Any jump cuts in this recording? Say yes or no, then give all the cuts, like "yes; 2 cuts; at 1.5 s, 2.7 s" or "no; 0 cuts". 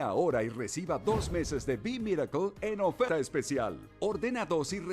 yes; 1 cut; at 3.1 s